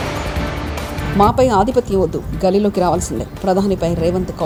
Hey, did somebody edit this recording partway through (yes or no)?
no